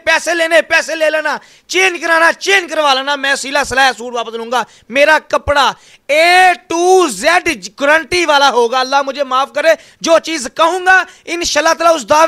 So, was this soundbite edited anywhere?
no; 0 cuts

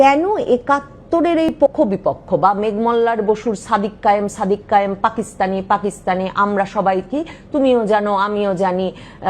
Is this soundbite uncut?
no; 1 cut; at 1.6 s

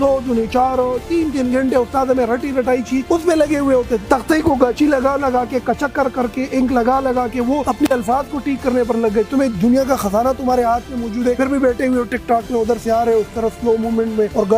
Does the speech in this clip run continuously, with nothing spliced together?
yes; 0 cuts

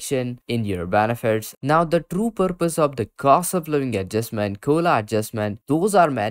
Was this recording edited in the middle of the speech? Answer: no; 0 cuts

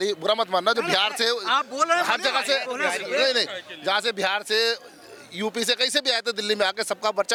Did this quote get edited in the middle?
no; 0 cuts

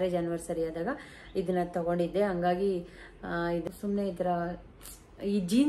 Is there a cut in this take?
yes; 1 cut; at 3.6 s

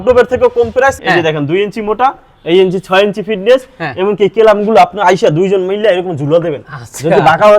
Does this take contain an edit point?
yes; 1 cut; at 1.0 s

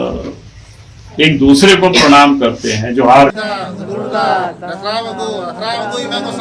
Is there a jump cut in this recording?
yes; 1 cut; at 3.3 s

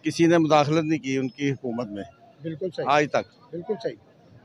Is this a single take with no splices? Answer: yes; 0 cuts

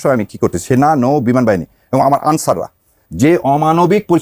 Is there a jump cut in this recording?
no; 0 cuts

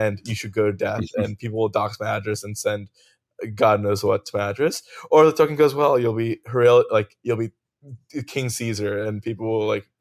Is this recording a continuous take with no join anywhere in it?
yes; 0 cuts

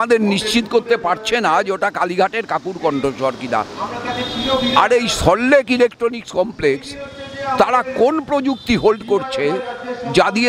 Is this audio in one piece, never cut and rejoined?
yes; 0 cuts

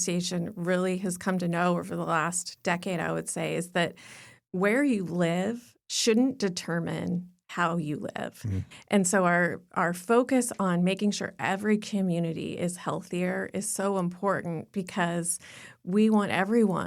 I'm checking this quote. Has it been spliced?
no; 0 cuts

